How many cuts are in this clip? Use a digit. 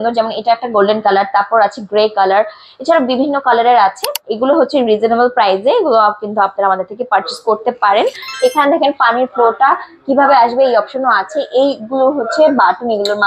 2